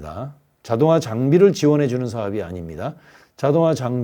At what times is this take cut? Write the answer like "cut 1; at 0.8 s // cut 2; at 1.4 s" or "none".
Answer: none